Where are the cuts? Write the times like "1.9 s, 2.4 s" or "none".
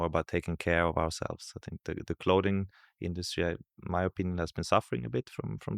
none